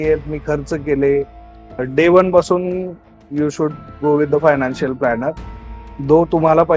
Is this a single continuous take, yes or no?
no